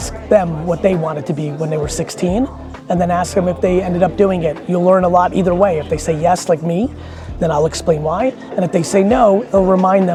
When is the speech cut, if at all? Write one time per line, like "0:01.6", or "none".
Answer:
none